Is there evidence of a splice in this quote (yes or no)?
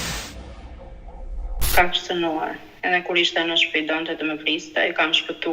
yes